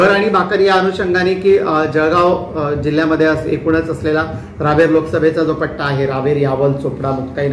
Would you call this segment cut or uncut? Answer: uncut